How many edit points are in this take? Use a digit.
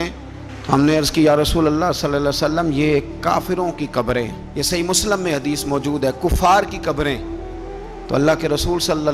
0